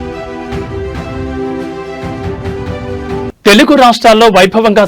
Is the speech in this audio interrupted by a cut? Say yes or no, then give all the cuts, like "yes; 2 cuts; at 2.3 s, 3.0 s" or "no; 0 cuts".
no; 0 cuts